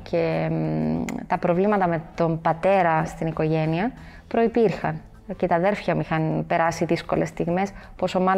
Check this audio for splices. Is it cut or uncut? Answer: uncut